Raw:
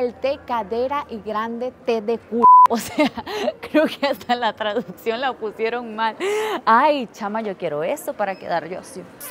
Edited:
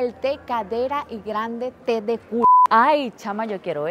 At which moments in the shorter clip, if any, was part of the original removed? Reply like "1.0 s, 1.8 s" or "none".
2.7 s